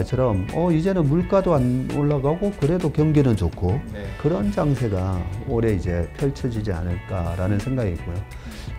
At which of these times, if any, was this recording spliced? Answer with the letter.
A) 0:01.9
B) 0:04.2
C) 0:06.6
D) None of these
B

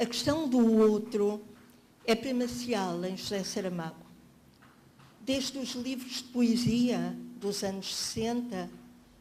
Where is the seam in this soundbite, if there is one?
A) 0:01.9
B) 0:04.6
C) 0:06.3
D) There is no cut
D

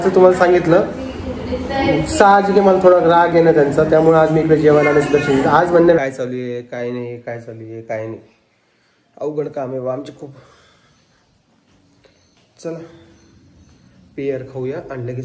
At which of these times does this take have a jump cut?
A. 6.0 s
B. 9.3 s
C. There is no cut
A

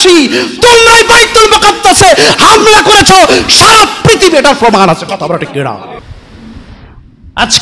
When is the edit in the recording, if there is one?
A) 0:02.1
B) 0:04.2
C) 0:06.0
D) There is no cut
C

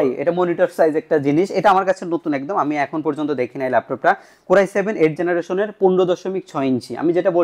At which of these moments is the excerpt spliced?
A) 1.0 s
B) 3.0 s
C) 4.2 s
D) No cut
D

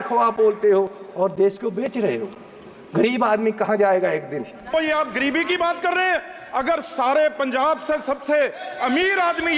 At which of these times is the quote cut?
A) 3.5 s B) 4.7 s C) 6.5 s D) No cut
B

